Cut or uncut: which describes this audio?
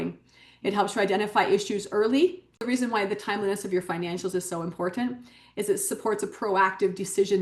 cut